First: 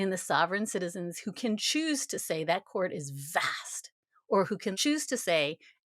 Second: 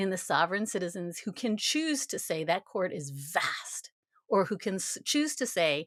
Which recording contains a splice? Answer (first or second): first